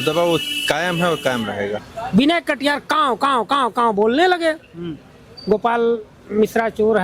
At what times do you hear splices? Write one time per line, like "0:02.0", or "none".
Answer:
0:01.9